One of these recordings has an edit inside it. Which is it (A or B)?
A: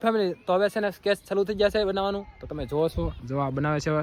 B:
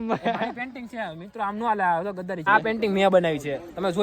B